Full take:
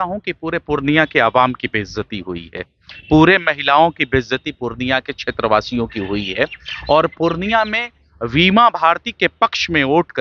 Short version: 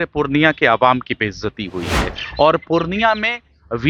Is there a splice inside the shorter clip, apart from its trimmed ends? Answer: yes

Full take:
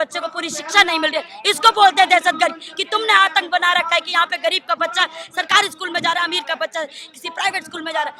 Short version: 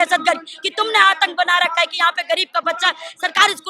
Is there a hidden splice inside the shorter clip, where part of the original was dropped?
no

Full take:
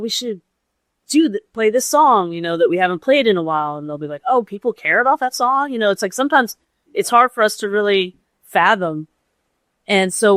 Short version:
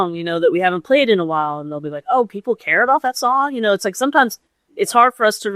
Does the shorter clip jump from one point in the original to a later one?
no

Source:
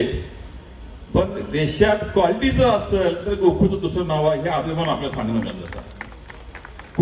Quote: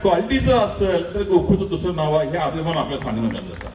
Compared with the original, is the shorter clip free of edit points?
yes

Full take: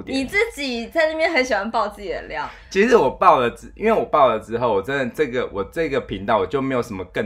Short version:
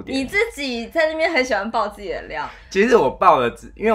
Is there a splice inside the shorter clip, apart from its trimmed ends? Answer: no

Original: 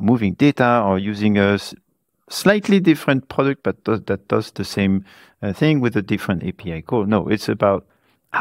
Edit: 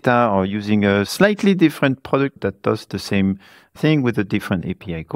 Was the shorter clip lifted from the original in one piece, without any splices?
no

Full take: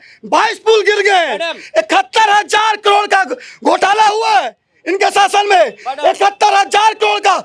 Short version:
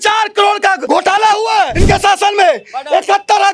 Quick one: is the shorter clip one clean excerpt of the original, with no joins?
no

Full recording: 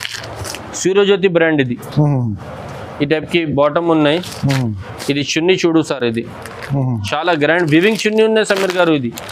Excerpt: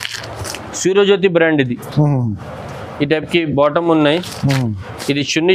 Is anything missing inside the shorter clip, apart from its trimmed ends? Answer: no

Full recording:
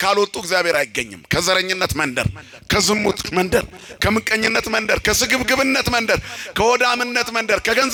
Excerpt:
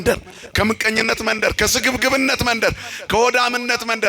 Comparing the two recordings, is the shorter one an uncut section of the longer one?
yes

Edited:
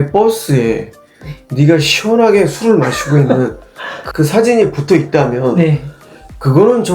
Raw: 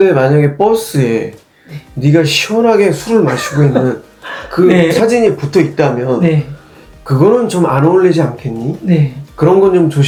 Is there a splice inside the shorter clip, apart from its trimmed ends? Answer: yes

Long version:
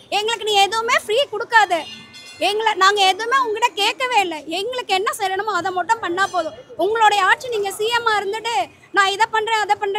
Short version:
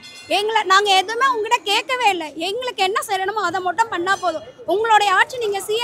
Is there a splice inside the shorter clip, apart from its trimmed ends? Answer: no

